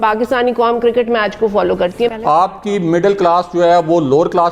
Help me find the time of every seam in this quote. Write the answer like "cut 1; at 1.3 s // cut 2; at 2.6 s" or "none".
cut 1; at 2.2 s

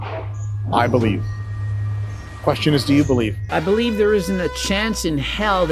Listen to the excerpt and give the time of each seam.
none

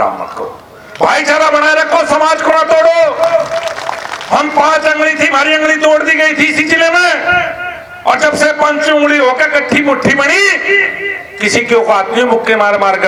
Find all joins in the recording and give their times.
none

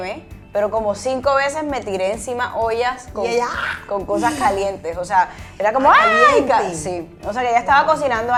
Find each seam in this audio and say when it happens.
none

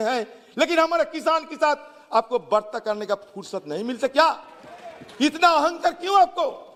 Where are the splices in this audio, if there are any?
none

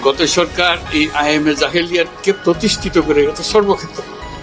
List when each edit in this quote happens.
none

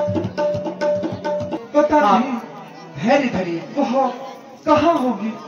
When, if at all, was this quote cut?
cut 1; at 1.6 s

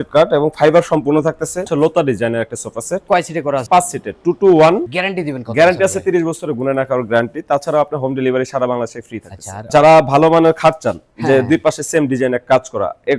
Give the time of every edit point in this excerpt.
cut 1; at 1.7 s // cut 2; at 4.8 s // cut 3; at 9.7 s

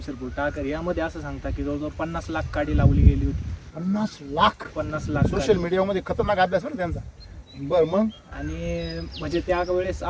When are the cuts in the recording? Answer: none

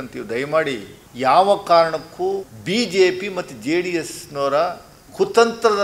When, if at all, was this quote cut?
cut 1; at 1.0 s // cut 2; at 2.5 s

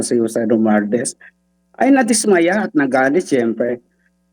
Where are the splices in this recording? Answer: none

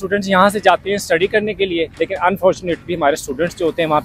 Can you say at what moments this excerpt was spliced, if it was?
cut 1; at 1.9 s

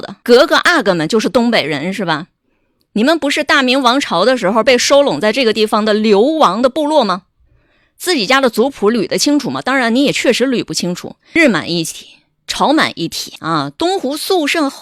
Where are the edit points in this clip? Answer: cut 1; at 11.2 s

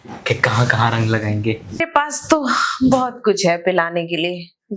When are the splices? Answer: cut 1; at 1.8 s

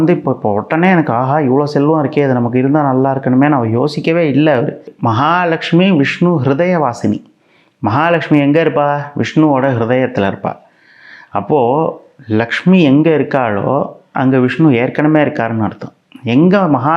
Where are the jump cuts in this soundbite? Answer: cut 1; at 4.9 s

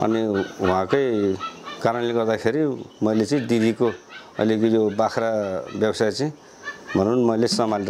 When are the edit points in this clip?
none

